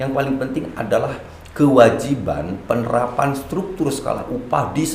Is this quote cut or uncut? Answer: uncut